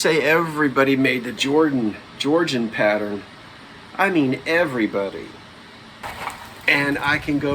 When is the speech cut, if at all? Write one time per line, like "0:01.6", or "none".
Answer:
0:06.1